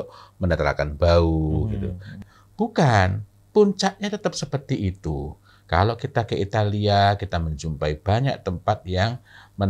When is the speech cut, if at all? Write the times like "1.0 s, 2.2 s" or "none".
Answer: 2.2 s